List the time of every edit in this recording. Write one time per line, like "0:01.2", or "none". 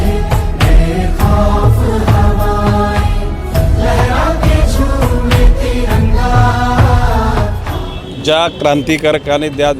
0:07.6

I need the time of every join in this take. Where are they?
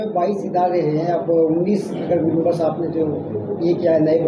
none

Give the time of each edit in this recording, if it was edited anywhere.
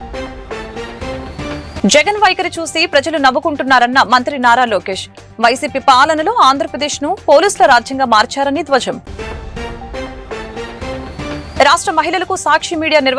0:01.5

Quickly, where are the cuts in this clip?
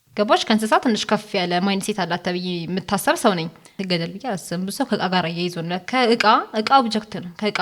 0:03.8

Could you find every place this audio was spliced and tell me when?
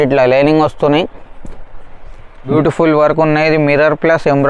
0:02.5

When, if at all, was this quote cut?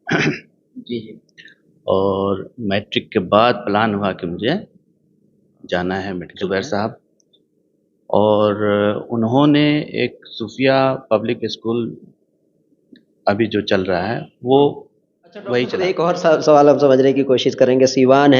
0:06.3
0:15.8

